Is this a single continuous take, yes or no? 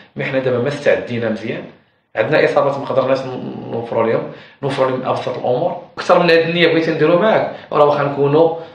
no